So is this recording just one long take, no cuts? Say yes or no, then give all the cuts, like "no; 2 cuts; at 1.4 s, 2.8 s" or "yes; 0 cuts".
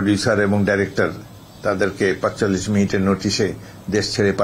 yes; 0 cuts